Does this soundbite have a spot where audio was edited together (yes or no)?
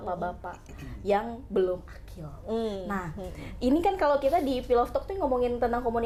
no